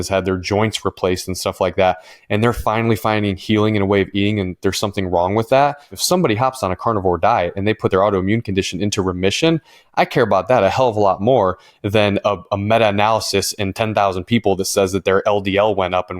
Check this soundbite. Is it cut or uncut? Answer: cut